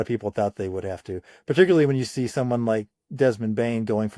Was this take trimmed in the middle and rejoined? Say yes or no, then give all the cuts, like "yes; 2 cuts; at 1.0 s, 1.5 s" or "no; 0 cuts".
no; 0 cuts